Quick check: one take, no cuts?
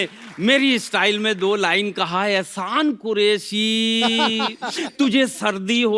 yes; 0 cuts

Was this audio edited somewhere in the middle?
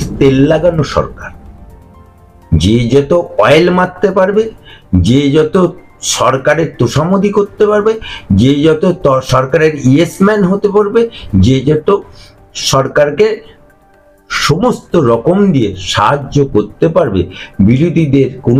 no; 0 cuts

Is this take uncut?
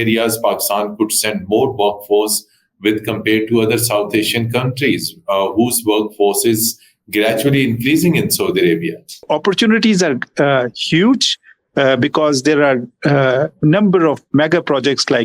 no; 1 cut; at 9.3 s

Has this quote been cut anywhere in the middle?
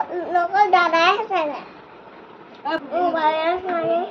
yes; 1 cut; at 2.8 s

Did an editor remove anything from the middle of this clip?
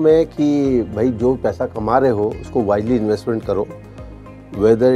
no; 0 cuts

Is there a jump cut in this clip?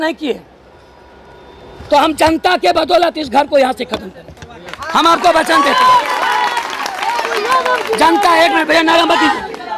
no; 0 cuts

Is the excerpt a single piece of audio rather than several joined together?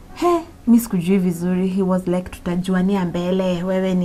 yes; 0 cuts

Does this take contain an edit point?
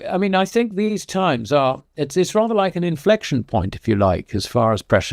no; 0 cuts

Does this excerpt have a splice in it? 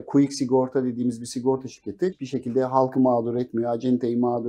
yes; 1 cut; at 2.1 s

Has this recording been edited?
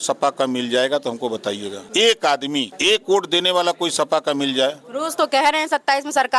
yes; 2 cuts; at 1.8 s, 2.7 s

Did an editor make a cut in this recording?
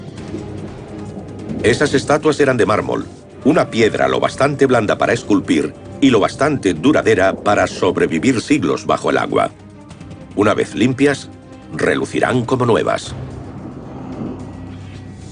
yes; 1 cut; at 12.1 s

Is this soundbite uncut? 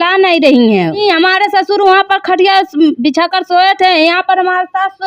no; 1 cut; at 1.0 s

